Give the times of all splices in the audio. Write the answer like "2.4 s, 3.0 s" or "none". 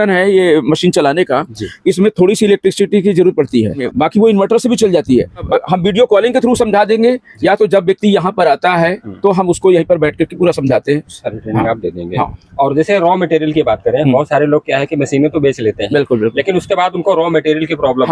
3.9 s, 5.5 s